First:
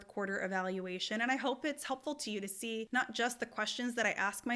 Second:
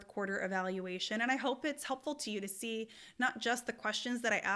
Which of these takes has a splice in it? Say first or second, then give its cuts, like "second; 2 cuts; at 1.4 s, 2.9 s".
first; 1 cut; at 2.9 s